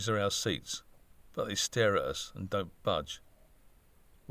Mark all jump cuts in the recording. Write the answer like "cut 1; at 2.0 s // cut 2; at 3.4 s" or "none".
none